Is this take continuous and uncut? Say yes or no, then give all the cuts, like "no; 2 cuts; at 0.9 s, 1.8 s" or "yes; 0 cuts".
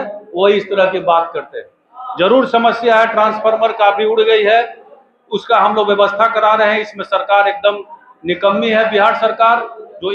yes; 0 cuts